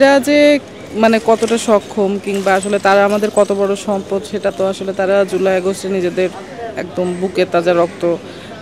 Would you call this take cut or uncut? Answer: uncut